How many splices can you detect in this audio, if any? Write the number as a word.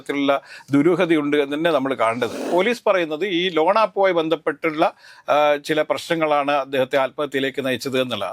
one